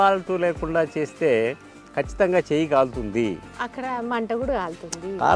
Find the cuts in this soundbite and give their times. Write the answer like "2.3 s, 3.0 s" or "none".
none